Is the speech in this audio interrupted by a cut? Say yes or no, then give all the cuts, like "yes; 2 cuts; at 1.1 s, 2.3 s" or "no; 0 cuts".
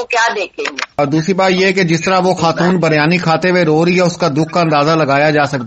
yes; 1 cut; at 1.0 s